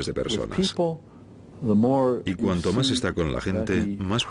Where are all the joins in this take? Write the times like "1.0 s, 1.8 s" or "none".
none